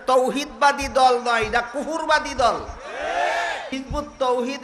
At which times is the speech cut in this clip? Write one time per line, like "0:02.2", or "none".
0:03.7